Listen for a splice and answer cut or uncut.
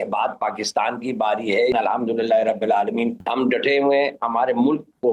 cut